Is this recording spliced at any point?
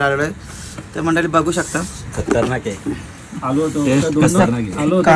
no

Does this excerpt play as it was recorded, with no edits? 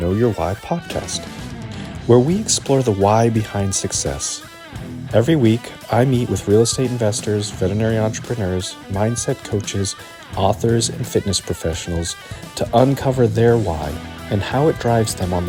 yes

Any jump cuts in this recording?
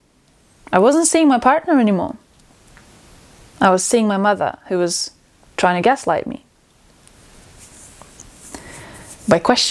no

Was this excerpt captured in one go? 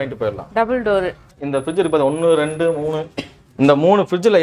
no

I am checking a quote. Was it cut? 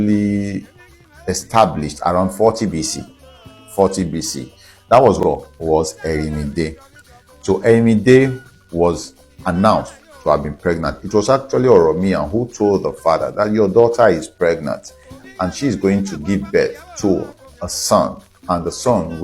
yes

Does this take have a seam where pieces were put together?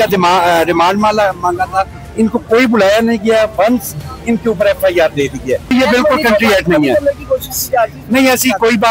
yes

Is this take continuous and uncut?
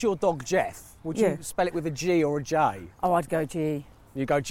no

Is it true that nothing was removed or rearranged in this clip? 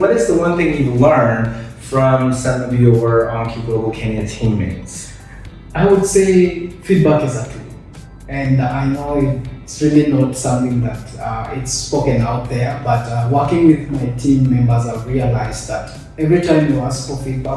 yes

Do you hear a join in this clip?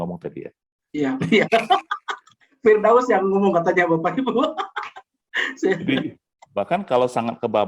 yes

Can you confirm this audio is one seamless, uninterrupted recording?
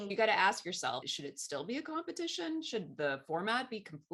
yes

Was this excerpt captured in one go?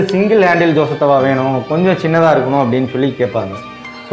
yes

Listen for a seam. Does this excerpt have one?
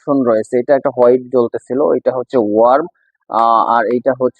no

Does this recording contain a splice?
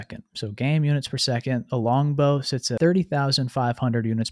yes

